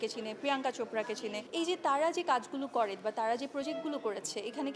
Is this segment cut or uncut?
uncut